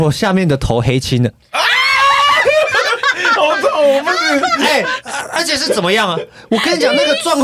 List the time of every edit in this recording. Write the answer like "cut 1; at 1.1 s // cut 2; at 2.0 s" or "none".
cut 1; at 2.9 s // cut 2; at 4.9 s

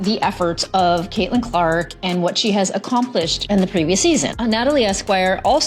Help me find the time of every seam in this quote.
cut 1; at 4.3 s

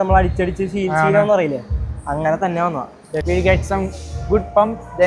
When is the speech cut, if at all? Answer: cut 1; at 3.2 s

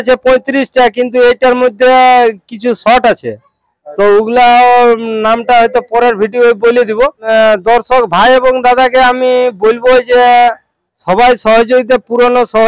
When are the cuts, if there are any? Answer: cut 1; at 7.2 s

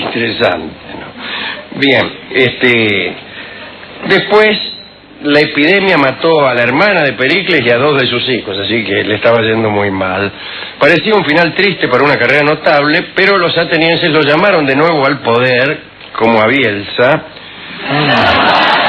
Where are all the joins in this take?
none

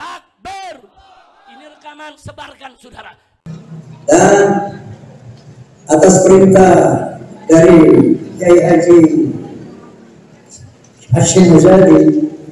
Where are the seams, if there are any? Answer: cut 1; at 3.4 s

